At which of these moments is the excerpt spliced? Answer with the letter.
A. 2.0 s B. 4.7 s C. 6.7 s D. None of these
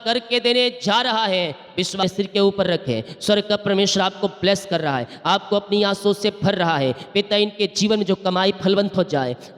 A